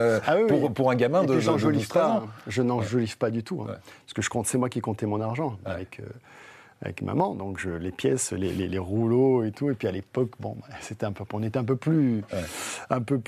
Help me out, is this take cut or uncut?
uncut